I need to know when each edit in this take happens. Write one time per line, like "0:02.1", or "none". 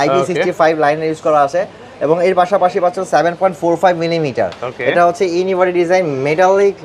none